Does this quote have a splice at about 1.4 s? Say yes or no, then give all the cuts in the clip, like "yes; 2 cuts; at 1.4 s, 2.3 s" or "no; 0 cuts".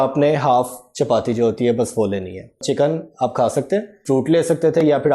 no; 2 cuts; at 2.6 s, 4.0 s